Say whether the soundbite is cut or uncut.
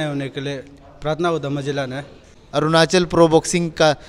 cut